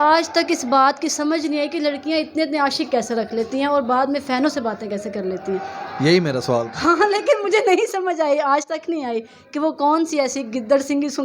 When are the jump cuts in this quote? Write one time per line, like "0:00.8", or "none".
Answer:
none